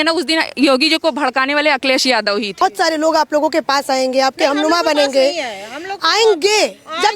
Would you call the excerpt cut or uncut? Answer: cut